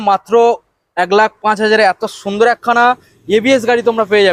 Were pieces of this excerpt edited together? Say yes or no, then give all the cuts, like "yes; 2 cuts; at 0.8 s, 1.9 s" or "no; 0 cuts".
no; 0 cuts